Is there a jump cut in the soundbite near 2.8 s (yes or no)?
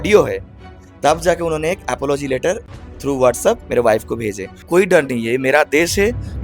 no